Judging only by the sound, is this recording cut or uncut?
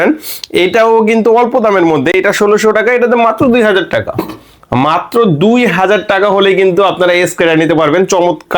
uncut